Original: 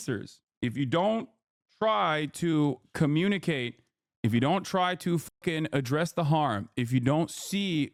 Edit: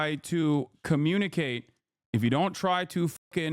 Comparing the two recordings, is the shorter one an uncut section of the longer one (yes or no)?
yes